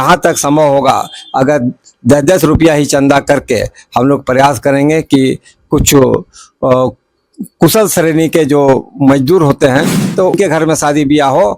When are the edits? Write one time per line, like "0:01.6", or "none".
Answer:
0:10.4